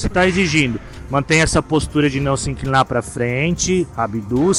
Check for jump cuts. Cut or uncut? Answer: uncut